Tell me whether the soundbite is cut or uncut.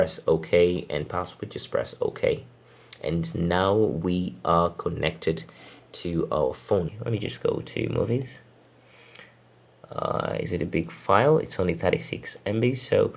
cut